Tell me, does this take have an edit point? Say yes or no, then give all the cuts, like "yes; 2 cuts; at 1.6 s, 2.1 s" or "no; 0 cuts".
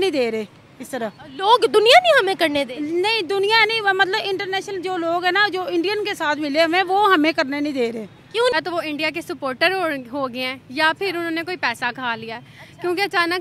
yes; 1 cut; at 8.5 s